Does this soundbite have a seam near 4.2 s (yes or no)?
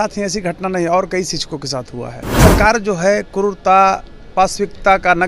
no